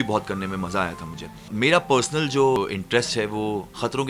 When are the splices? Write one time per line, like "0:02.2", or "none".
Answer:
0:01.4